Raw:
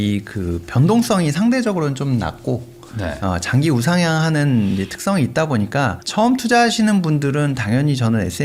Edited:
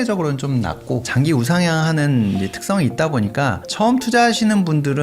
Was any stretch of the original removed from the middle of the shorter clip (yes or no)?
yes